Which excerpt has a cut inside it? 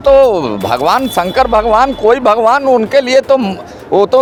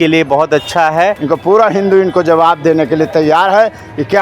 second; 1 cut; at 1.2 s

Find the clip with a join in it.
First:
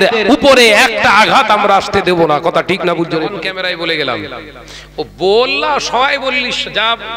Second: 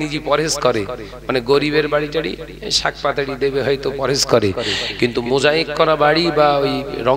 first; 1 cut; at 3.4 s

